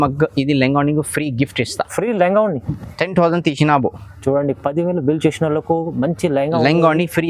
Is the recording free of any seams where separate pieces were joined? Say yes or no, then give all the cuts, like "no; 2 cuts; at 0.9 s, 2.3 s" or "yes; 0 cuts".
yes; 0 cuts